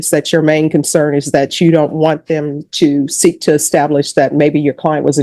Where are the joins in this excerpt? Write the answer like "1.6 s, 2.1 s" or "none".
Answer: none